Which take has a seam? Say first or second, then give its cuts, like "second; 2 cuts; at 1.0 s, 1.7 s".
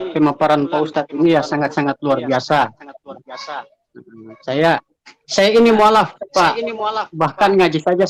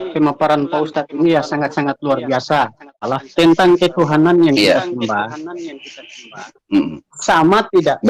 second; 1 cut; at 3.1 s